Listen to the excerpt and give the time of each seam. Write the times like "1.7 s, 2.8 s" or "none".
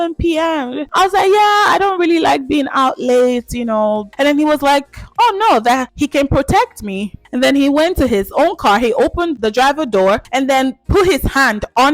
5.9 s, 7.2 s, 10.3 s